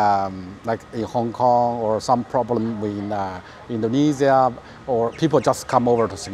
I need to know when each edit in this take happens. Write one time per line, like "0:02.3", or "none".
none